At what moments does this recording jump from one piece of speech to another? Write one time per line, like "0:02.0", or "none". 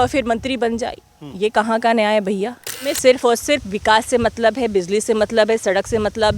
0:02.9